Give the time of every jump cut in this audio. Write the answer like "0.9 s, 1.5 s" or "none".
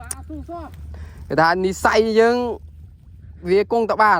none